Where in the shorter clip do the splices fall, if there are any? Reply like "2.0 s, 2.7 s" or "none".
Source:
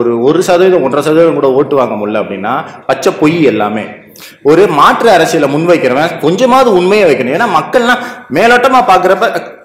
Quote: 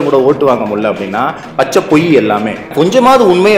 2.7 s